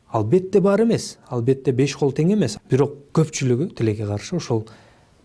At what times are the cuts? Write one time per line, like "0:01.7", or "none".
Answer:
0:02.5